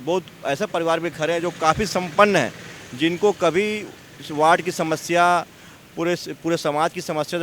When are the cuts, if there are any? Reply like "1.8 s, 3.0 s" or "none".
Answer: none